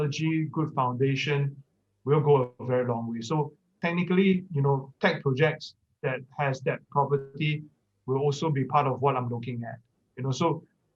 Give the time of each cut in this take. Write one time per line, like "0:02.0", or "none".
none